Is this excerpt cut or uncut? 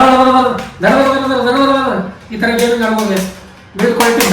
cut